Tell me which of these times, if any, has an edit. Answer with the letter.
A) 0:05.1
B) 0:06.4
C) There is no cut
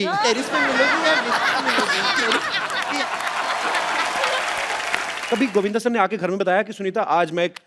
A